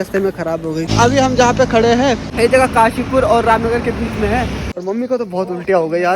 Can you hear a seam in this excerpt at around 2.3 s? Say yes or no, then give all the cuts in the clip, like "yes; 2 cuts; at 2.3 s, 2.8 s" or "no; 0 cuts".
yes; 3 cuts; at 0.9 s, 2.3 s, 4.6 s